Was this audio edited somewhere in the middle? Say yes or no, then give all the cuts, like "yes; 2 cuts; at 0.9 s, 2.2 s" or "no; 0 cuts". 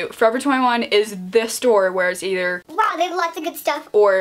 no; 0 cuts